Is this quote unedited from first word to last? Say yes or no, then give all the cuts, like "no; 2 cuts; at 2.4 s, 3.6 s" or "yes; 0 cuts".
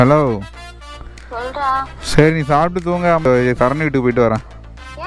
no; 1 cut; at 3.4 s